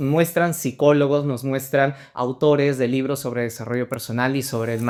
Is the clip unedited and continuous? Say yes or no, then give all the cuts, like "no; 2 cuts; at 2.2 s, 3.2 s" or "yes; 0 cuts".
yes; 0 cuts